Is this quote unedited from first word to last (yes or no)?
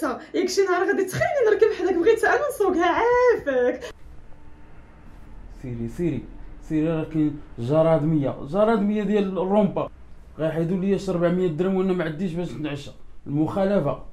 no